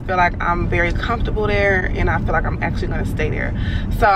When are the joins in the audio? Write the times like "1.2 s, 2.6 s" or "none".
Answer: none